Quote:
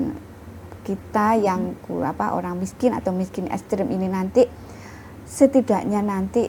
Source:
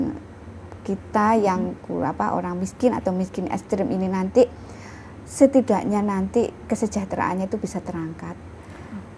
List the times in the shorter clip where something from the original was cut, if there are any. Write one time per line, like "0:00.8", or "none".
none